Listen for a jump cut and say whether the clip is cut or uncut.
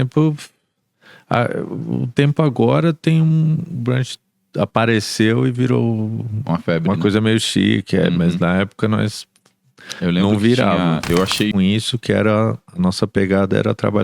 cut